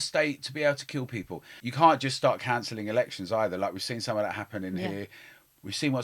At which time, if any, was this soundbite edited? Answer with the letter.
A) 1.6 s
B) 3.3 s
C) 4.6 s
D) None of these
A